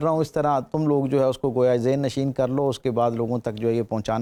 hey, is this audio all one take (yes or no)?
yes